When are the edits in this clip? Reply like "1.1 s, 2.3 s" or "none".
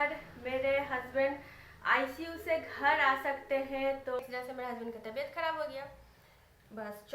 4.2 s